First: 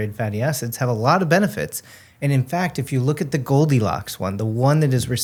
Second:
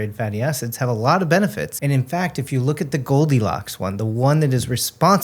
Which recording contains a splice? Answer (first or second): second